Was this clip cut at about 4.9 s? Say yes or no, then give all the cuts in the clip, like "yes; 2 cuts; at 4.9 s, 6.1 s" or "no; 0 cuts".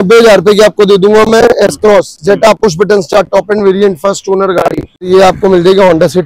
yes; 1 cut; at 4.9 s